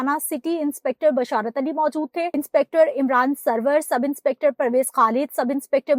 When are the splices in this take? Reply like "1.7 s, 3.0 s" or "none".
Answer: 2.3 s